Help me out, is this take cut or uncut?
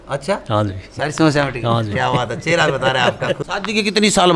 cut